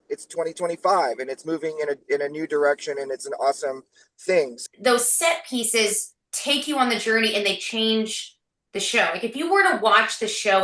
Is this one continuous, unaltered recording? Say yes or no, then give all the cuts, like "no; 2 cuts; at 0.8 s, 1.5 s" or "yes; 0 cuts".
no; 1 cut; at 4.6 s